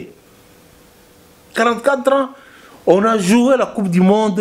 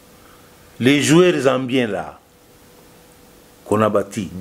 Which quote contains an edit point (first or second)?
first